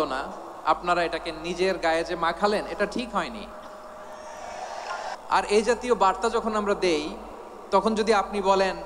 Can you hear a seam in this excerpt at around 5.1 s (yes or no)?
yes